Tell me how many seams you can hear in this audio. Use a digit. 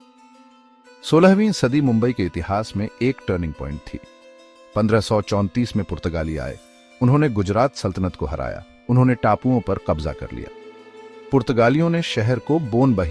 1